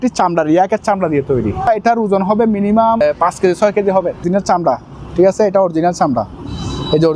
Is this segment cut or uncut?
cut